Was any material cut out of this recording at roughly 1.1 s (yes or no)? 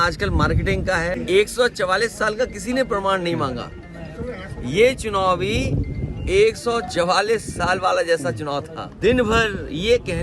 yes